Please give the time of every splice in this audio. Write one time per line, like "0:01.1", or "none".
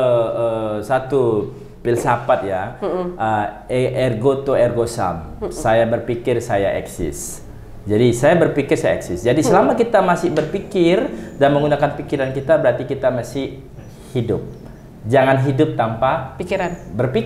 none